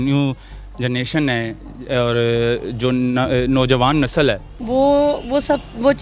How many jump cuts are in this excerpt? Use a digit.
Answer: 1